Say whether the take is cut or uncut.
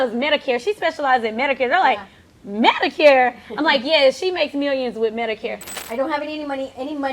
cut